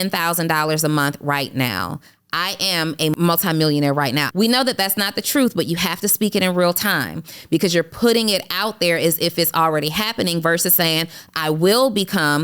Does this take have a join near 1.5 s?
no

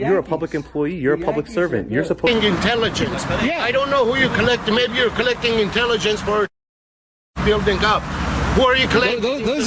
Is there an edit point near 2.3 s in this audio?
yes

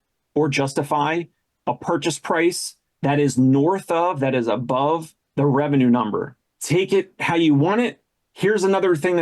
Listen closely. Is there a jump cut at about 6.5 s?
yes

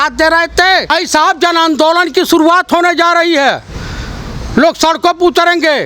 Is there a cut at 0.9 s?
yes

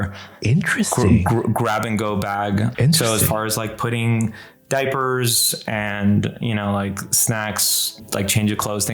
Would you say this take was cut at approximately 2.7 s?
yes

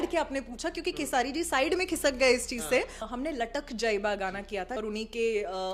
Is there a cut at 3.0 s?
yes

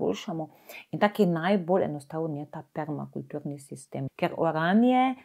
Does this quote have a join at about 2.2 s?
no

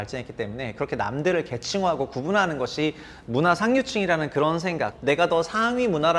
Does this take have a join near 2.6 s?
no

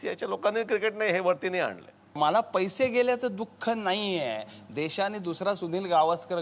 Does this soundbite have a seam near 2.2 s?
yes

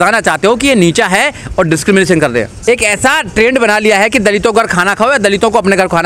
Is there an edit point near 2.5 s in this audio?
yes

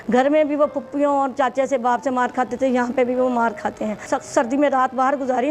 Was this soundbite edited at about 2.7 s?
no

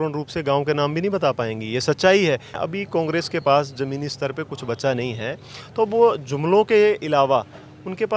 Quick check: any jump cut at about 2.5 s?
yes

